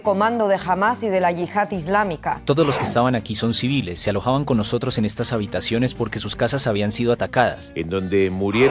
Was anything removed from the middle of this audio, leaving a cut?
yes; 1 cut; at 2.4 s

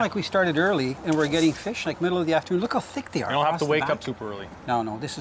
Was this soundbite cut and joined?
no; 0 cuts

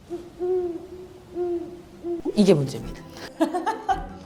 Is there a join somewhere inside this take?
no; 0 cuts

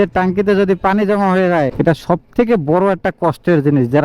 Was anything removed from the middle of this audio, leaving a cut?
yes; 1 cut; at 1.7 s

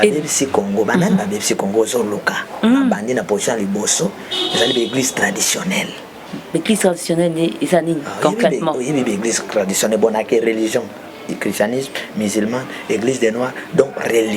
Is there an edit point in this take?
no; 0 cuts

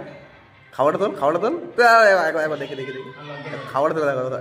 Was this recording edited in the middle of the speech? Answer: no; 0 cuts

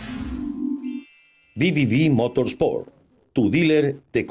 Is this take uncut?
no; 1 cut; at 1.0 s

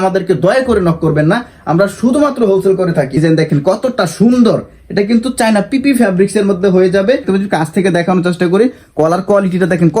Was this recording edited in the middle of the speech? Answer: yes; 2 cuts; at 3.2 s, 7.3 s

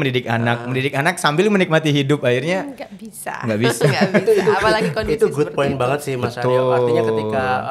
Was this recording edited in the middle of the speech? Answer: no; 0 cuts

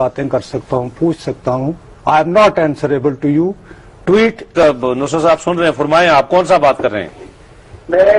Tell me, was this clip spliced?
no; 0 cuts

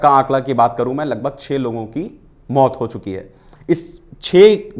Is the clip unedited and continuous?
yes; 0 cuts

